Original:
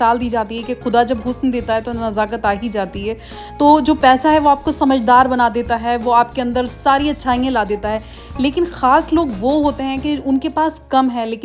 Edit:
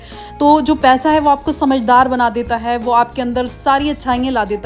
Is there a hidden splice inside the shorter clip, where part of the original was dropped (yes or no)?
no